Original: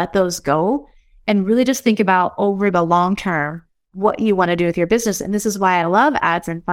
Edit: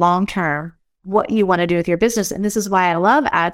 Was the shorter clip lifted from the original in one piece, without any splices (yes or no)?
yes